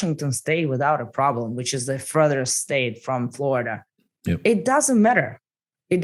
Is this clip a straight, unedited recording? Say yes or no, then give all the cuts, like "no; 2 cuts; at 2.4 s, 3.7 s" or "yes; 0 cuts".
yes; 0 cuts